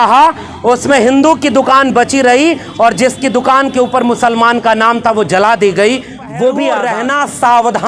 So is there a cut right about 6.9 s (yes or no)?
yes